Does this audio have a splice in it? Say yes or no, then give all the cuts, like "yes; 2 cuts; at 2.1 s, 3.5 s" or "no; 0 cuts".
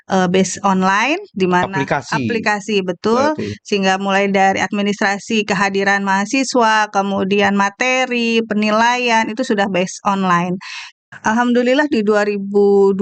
yes; 1 cut; at 11.0 s